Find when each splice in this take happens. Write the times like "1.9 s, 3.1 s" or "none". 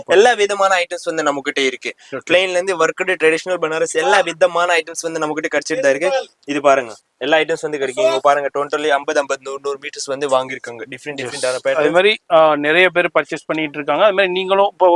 none